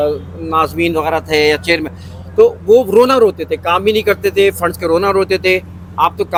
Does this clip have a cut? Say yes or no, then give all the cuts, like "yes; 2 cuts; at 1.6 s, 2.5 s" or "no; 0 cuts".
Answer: no; 0 cuts